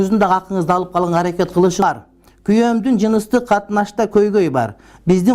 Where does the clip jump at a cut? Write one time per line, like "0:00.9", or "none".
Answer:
0:01.8